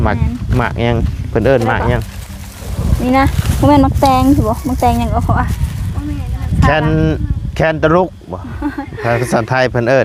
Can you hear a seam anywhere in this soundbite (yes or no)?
no